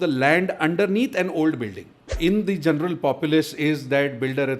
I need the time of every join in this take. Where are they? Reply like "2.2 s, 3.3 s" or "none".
2.1 s